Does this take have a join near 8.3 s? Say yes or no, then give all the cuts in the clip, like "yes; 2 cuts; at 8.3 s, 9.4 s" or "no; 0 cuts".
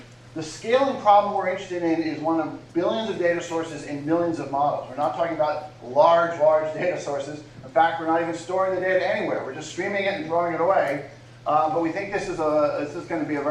no; 1 cut; at 4.4 s